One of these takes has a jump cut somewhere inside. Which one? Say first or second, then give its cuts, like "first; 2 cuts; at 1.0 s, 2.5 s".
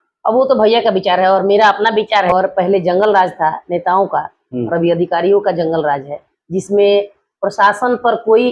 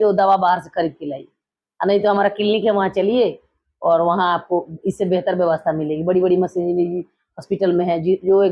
first; 1 cut; at 2.3 s